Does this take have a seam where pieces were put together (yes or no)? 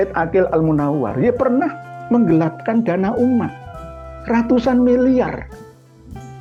no